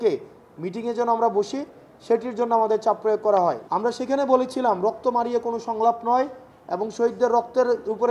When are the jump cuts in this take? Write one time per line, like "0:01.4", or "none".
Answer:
0:03.6